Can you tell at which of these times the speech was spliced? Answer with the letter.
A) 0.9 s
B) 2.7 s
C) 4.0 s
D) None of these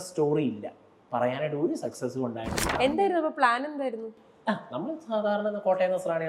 B